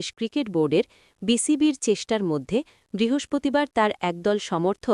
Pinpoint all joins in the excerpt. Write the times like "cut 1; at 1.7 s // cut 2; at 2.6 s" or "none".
none